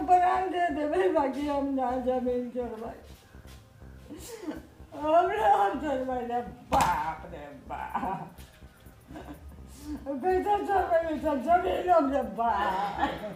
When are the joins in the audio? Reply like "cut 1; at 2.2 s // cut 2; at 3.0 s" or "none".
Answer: none

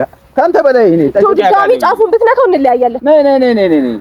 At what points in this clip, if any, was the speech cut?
none

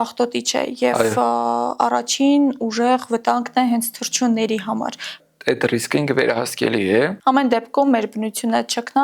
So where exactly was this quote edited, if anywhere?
cut 1; at 5.2 s // cut 2; at 7.2 s

